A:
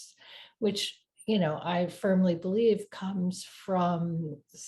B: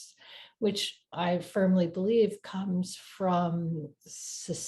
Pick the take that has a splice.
B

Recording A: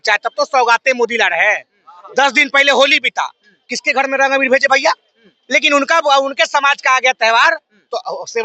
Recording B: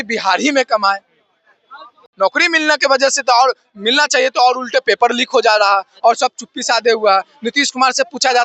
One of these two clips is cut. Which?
B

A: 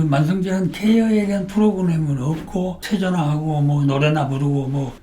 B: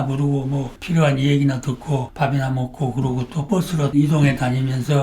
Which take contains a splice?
A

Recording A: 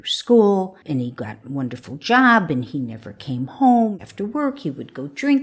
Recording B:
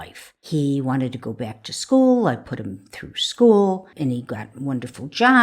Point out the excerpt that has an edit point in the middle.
A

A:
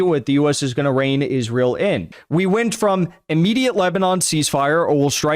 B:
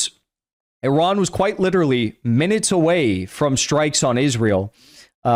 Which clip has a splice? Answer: A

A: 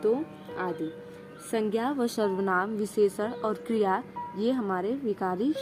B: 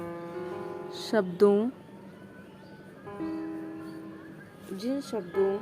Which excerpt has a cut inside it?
B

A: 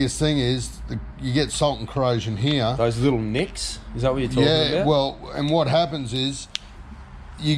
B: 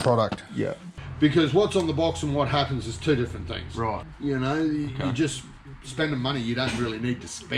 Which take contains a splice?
B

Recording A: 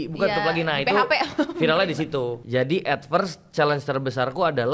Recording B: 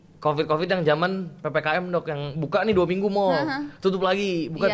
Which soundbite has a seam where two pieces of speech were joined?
A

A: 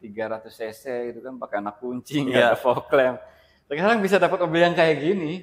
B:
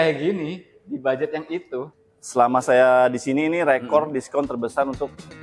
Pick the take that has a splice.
B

